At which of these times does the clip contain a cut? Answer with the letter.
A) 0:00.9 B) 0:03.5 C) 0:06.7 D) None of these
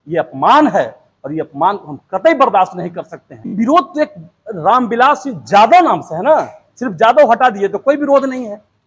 B